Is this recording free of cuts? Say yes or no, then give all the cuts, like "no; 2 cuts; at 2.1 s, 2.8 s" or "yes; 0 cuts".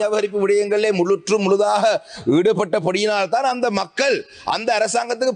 yes; 0 cuts